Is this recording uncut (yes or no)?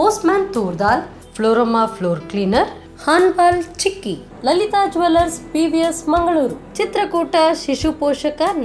yes